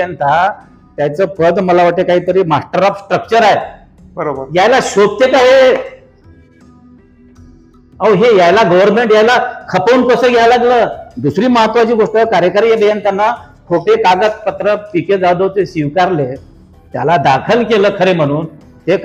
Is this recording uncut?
yes; 0 cuts

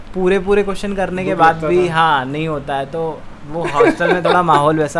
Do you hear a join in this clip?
no; 0 cuts

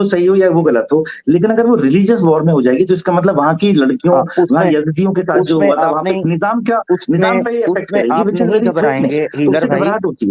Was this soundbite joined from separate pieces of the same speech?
no; 0 cuts

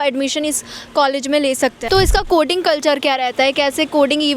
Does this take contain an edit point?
yes; 1 cut; at 1.8 s

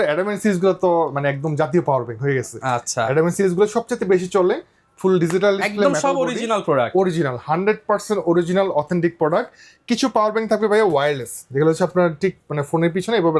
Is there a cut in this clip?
no; 0 cuts

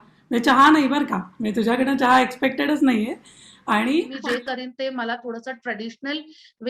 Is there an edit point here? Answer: yes; 1 cut; at 4.1 s

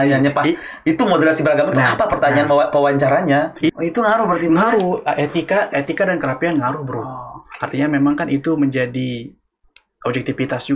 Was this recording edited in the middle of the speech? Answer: yes; 1 cut; at 3.7 s

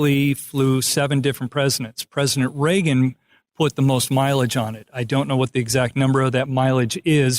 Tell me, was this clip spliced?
yes; 1 cut; at 6.5 s

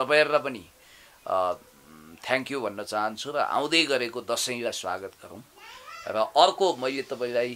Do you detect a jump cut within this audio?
no; 0 cuts

